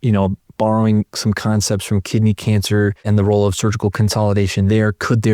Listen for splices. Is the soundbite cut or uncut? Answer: cut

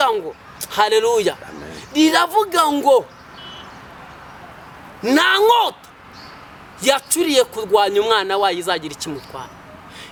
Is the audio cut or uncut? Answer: uncut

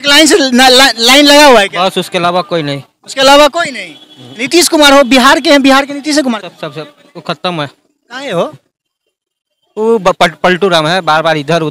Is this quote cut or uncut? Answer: uncut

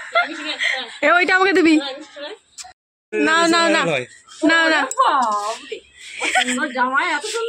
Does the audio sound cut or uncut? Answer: cut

